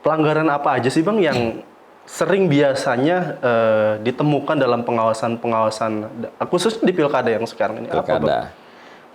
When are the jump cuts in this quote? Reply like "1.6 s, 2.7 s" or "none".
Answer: none